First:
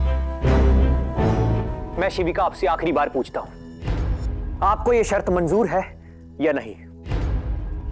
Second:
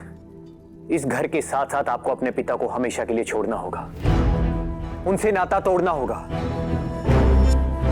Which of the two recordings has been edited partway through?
first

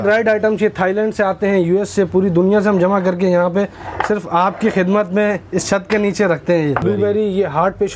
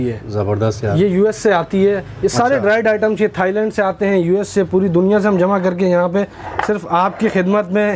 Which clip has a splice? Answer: first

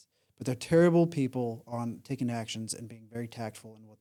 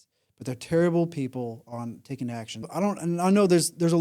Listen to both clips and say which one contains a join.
second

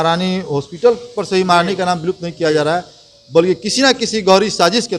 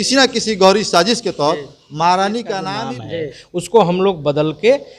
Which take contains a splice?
second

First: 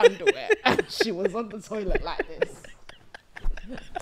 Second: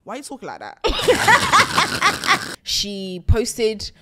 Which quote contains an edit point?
second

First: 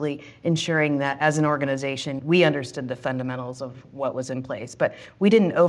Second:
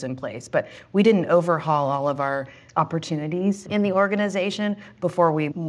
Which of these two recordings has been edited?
second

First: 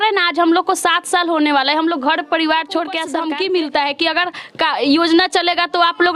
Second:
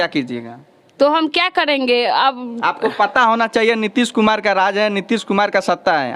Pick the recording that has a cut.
first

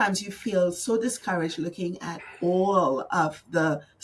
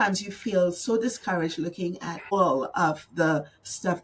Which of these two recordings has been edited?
second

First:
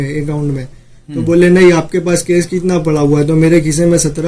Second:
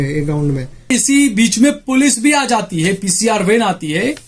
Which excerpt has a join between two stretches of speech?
second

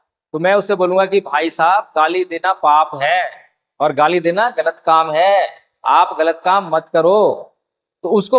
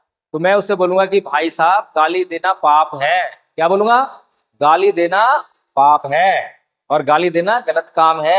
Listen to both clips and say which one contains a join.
first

